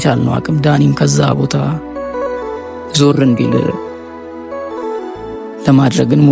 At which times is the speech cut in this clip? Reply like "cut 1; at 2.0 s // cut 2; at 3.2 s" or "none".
cut 1; at 3.7 s // cut 2; at 5.1 s